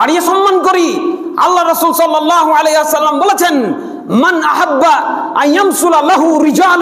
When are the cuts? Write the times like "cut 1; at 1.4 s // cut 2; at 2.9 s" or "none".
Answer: none